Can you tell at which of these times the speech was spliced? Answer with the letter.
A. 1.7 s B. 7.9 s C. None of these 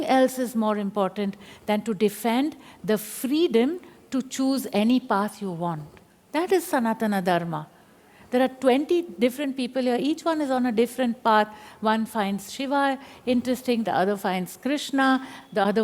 C